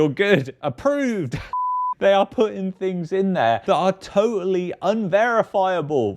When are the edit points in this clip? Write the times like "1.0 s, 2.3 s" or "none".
1.9 s